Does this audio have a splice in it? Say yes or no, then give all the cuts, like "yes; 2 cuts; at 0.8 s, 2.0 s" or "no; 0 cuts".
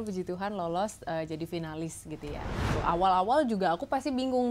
yes; 1 cut; at 2.7 s